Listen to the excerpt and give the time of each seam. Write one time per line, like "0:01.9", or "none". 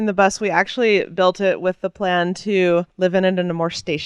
none

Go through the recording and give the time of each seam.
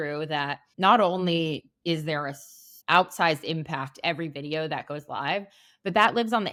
none

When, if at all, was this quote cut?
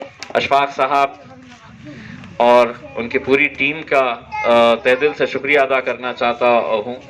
none

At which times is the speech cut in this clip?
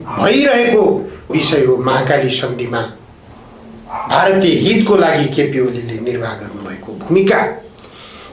0:01.3

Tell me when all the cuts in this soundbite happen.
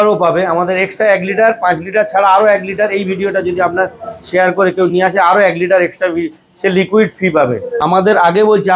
0:07.8

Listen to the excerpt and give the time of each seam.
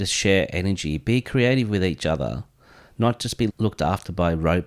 0:03.5

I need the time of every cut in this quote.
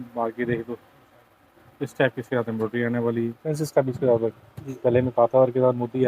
0:03.4

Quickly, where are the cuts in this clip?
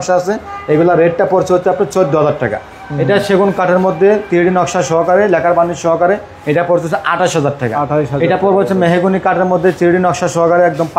none

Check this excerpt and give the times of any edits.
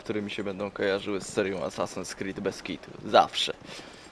none

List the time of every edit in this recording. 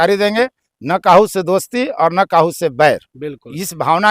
none

